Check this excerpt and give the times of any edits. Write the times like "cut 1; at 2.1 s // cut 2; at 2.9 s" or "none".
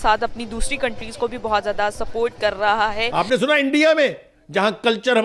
cut 1; at 3.1 s